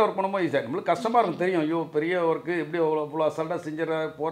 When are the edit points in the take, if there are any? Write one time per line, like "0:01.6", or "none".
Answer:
none